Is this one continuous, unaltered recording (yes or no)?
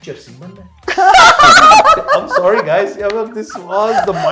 yes